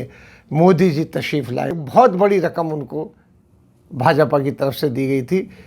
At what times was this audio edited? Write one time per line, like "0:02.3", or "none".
0:01.8